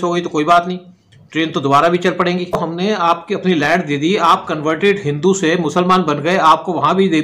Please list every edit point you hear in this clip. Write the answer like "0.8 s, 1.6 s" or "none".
2.6 s